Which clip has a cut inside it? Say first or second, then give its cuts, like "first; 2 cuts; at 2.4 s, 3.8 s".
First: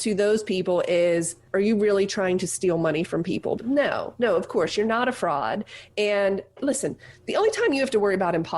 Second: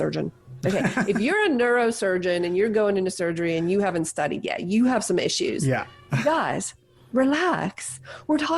first; 3 cuts; at 1.4 s, 3.6 s, 6.6 s